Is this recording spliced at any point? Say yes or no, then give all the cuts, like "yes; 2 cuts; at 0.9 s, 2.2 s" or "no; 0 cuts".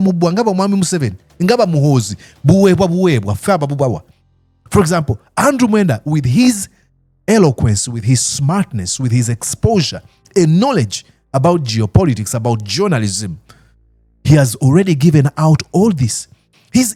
no; 0 cuts